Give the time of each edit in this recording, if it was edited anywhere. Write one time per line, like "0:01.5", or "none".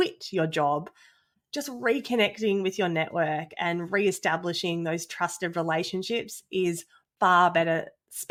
none